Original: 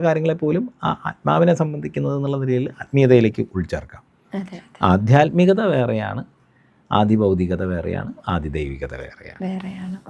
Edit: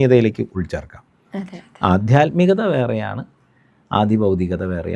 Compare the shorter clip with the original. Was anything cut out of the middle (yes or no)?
no